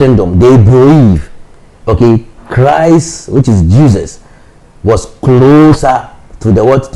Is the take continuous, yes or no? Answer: yes